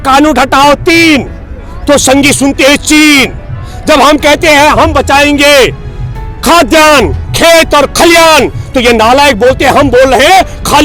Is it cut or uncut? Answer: uncut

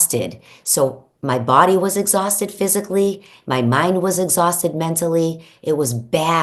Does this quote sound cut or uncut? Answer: uncut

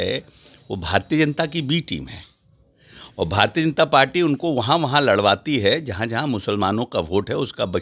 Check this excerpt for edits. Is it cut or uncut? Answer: uncut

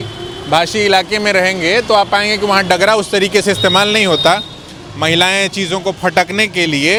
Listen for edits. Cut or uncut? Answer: uncut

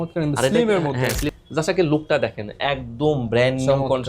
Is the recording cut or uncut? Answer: cut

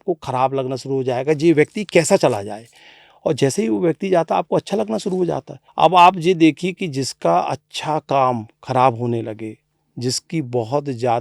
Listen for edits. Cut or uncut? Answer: cut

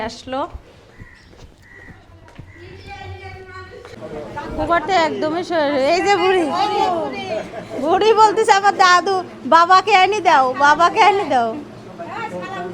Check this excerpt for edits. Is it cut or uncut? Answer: cut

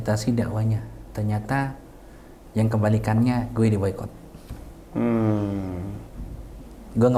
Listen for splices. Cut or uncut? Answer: uncut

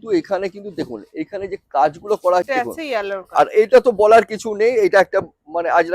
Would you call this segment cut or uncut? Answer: cut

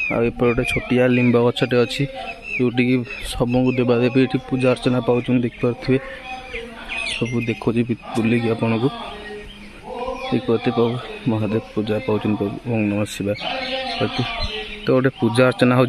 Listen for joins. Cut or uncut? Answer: uncut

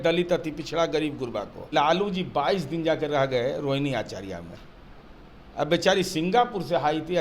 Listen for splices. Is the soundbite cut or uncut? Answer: cut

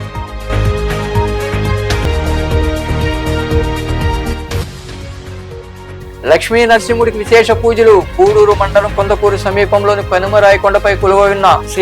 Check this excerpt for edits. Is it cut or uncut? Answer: cut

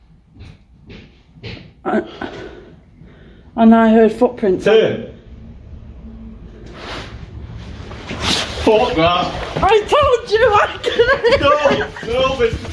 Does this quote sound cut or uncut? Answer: uncut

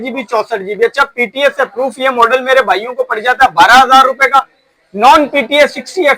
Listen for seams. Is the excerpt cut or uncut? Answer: uncut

